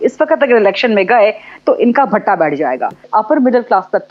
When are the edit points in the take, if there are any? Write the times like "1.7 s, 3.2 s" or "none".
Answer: 3.0 s